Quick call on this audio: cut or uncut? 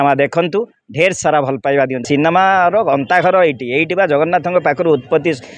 cut